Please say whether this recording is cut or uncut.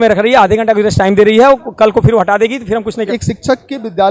cut